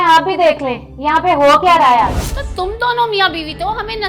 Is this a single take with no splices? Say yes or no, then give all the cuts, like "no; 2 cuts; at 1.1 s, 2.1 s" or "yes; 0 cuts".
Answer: no; 1 cut; at 2.3 s